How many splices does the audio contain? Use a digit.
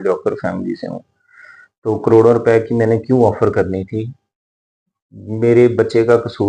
0